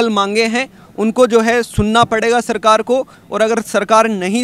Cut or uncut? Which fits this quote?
uncut